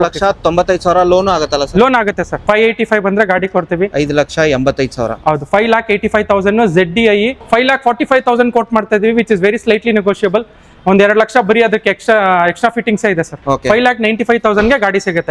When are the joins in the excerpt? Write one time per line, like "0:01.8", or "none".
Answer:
0:02.4
0:07.4
0:13.3